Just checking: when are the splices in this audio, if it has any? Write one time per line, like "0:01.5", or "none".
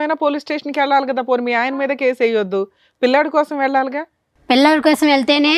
none